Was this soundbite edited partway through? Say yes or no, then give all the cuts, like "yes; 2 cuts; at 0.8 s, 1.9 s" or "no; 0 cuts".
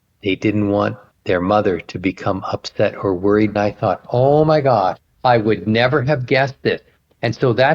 yes; 2 cuts; at 1.1 s, 3.5 s